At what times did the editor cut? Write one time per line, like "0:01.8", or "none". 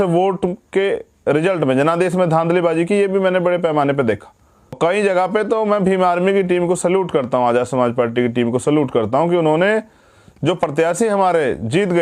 0:04.8